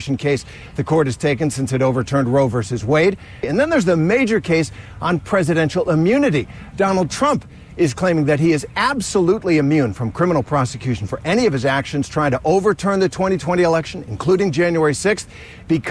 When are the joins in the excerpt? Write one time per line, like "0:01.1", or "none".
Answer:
none